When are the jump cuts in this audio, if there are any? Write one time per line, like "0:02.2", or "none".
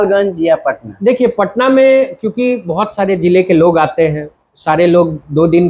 none